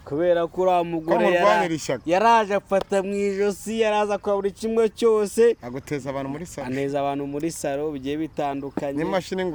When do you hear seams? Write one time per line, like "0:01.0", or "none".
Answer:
none